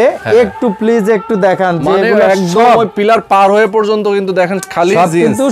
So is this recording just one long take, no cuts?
yes; 0 cuts

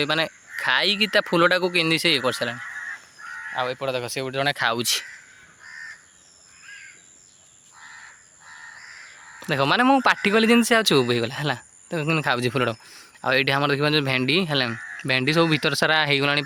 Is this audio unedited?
yes; 0 cuts

